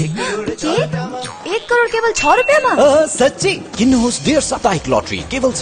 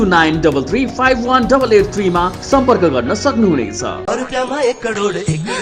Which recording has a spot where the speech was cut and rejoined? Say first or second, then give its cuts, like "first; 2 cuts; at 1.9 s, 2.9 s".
second; 1 cut; at 4.0 s